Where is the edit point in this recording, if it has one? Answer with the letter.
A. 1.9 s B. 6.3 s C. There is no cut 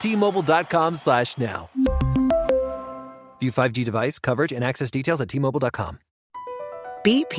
B